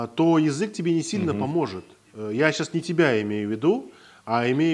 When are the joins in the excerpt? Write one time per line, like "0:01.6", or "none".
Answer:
none